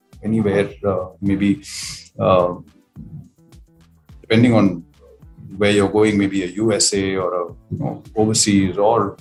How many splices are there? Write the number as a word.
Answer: zero